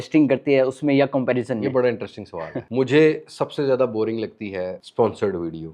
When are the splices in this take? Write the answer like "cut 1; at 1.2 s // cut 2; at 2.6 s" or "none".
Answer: cut 1; at 2.7 s // cut 2; at 4.8 s